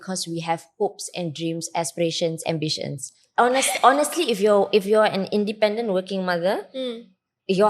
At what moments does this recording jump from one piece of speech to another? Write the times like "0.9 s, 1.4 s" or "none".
3.2 s